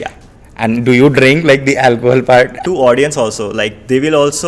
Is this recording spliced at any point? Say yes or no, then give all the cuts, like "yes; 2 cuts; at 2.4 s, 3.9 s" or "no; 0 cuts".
yes; 1 cut; at 2.5 s